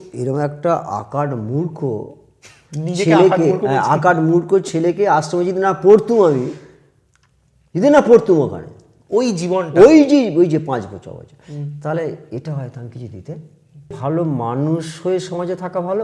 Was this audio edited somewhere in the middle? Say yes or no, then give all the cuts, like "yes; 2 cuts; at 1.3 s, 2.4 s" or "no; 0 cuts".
yes; 1 cut; at 14.0 s